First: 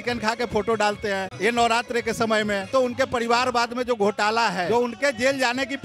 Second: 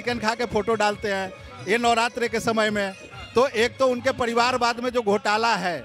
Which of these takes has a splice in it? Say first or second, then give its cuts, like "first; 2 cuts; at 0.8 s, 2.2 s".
first; 3 cuts; at 1.3 s, 2.7 s, 4.6 s